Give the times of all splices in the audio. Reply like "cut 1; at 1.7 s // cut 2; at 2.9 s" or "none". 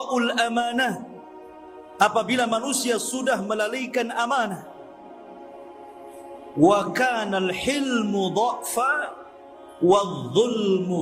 cut 1; at 4.6 s // cut 2; at 6.3 s